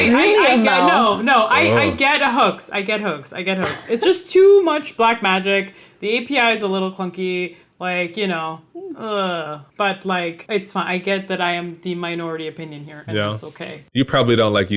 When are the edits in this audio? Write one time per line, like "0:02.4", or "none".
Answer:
0:09.6
0:10.4
0:13.8